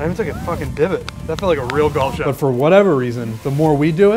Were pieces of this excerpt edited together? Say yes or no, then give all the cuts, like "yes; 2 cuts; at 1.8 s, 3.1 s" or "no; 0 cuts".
yes; 1 cut; at 2.2 s